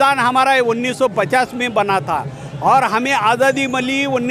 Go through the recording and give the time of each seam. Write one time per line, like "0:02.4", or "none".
none

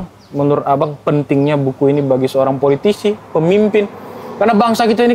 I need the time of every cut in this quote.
none

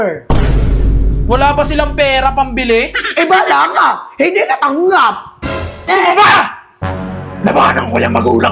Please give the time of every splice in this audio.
0:05.9

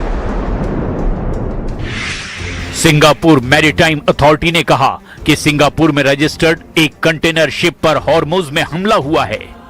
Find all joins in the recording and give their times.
0:05.9

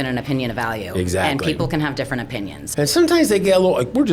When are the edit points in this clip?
0:02.6

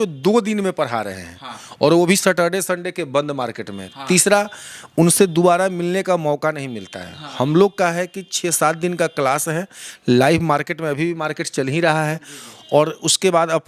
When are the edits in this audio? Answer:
none

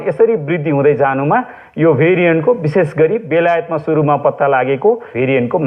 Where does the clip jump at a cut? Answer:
none

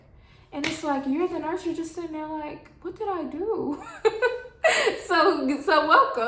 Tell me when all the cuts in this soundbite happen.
none

